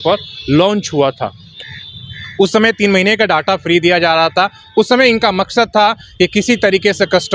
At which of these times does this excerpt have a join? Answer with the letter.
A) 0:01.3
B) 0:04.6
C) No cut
C